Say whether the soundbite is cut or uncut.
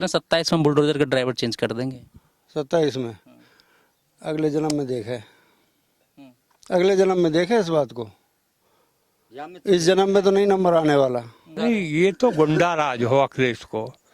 cut